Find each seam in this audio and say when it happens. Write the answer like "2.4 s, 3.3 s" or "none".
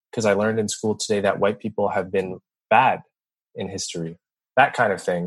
4.4 s

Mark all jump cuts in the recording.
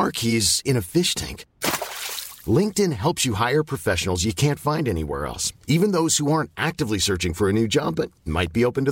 none

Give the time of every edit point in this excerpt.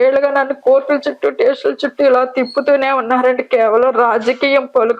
none

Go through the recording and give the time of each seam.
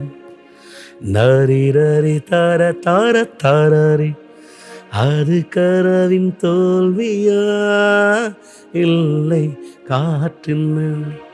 none

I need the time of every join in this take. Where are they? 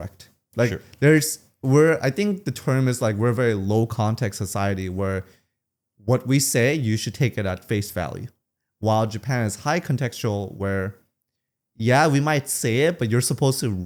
none

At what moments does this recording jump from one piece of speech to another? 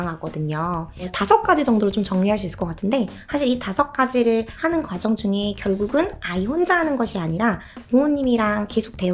1.1 s, 3.2 s, 4.5 s

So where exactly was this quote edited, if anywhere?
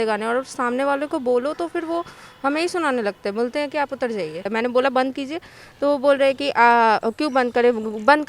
4.4 s

